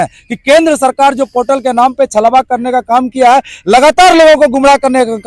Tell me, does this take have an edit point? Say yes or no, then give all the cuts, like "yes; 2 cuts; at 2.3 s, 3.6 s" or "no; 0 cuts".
no; 0 cuts